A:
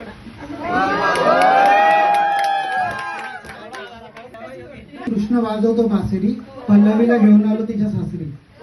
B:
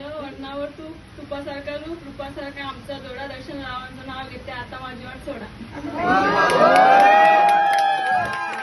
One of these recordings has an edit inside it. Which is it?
A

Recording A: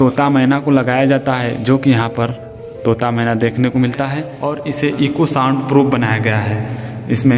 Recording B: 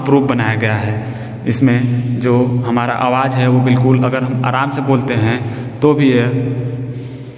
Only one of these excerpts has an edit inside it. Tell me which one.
A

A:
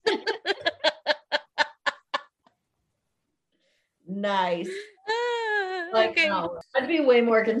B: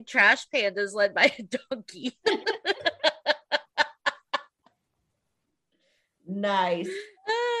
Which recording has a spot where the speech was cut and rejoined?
A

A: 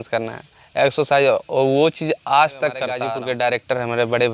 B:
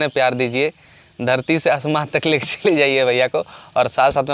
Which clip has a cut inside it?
A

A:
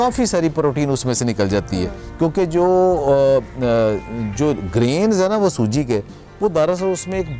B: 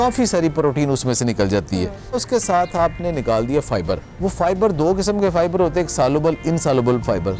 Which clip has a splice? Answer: B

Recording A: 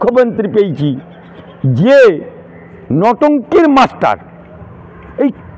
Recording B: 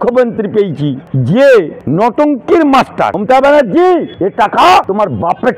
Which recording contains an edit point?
B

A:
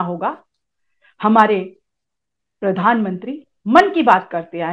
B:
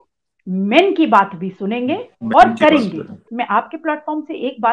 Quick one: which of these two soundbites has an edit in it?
B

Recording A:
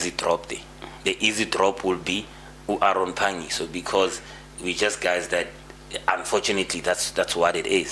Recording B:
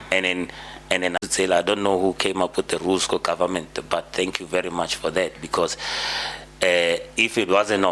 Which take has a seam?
B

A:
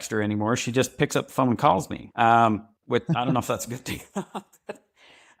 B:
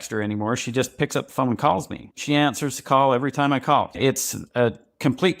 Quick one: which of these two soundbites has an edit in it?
B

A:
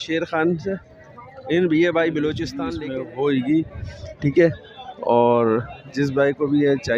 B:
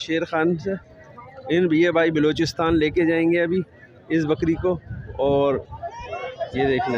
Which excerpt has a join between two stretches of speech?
A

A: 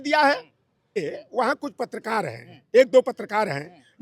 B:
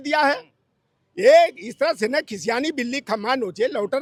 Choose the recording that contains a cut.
A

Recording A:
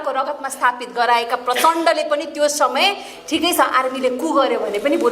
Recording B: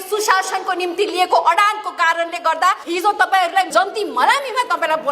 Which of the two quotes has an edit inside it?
B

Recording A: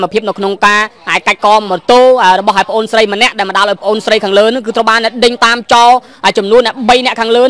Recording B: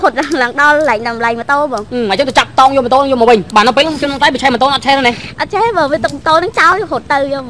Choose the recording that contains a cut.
B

